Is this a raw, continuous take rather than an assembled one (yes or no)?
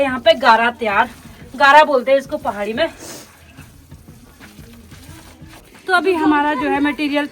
yes